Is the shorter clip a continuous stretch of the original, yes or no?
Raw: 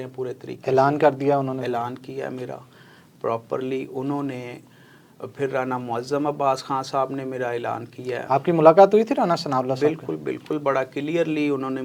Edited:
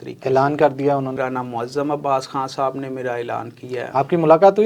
no